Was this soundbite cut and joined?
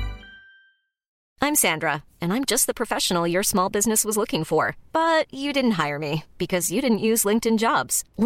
yes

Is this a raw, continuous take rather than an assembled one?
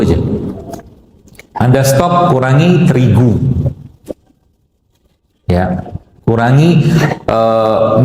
yes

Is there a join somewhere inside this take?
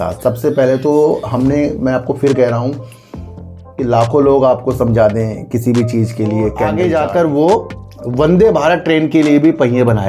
yes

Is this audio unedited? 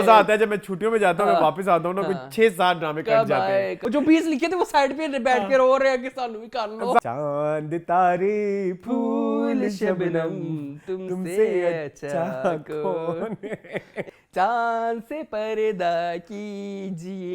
no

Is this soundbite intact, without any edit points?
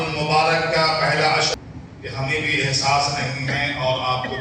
no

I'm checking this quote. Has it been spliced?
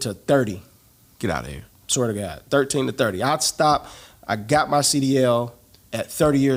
no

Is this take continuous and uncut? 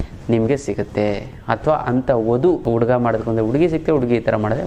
no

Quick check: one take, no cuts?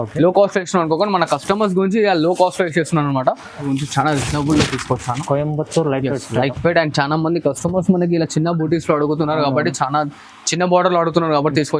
no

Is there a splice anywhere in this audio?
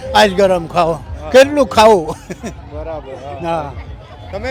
no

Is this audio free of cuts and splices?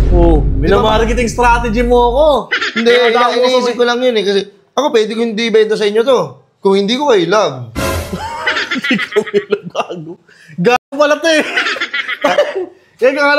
yes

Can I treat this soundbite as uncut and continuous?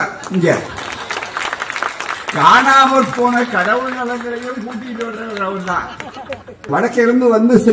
no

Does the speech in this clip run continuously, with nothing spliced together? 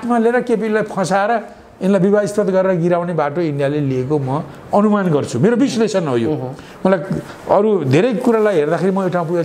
yes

